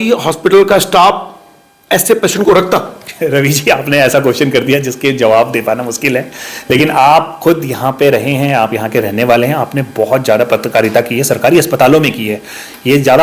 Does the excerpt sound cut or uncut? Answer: uncut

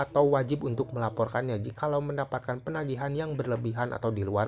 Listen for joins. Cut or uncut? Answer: uncut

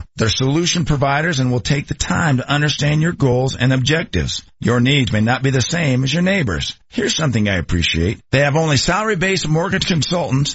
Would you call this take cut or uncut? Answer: uncut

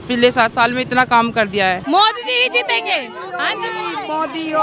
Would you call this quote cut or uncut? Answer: cut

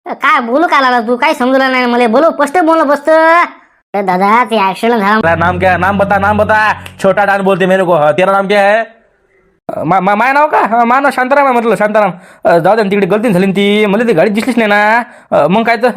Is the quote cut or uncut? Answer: cut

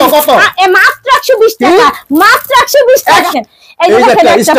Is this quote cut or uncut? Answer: cut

